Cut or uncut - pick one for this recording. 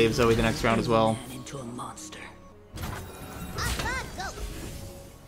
cut